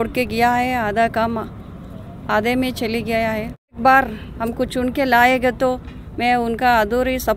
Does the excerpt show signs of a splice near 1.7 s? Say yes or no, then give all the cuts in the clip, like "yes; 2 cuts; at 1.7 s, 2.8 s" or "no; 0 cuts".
no; 1 cut; at 3.8 s